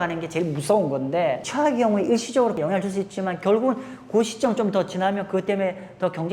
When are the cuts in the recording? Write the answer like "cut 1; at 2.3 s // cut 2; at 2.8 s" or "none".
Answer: cut 1; at 1.5 s // cut 2; at 2.6 s